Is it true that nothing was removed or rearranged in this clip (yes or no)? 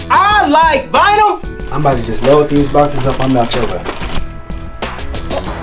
no